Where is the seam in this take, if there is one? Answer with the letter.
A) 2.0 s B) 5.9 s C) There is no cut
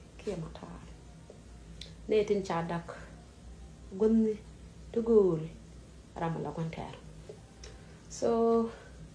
A